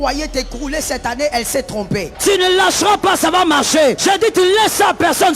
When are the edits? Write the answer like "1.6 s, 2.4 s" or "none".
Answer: 2.1 s, 4.0 s